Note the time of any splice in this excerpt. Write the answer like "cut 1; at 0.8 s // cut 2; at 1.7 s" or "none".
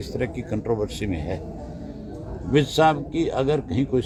none